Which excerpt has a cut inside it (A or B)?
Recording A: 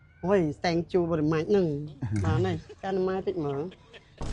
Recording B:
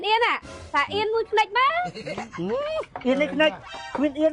A